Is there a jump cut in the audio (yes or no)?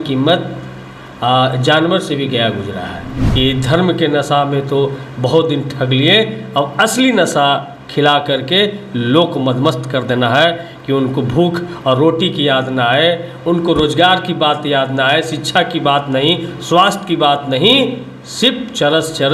yes